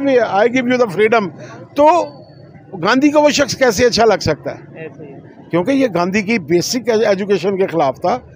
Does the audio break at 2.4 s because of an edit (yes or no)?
no